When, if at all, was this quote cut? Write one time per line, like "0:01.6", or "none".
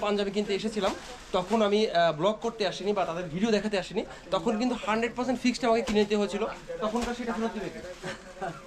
none

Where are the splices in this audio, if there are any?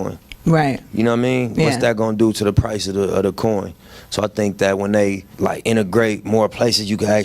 0:05.3

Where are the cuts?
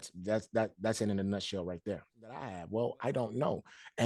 0:02.6

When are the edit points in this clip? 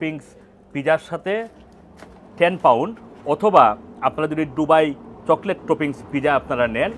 none

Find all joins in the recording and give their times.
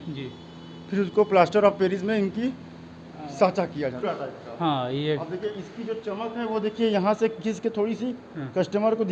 0:04.0

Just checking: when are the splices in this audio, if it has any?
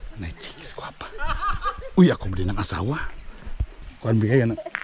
0:03.9

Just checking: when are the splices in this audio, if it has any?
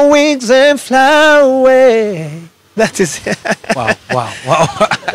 none

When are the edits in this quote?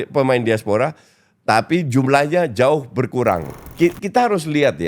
0:03.5

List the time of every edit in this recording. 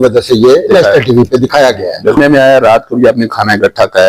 0:02.2

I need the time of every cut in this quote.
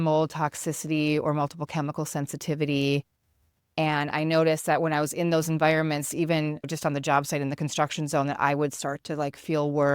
0:06.7

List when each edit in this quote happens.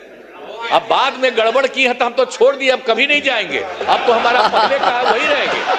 none

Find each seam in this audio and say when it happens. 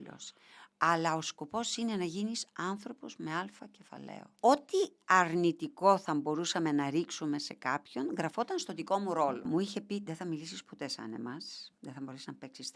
0:04.3
0:09.5

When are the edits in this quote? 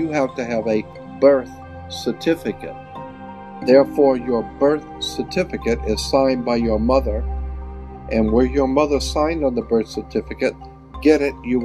0:03.2

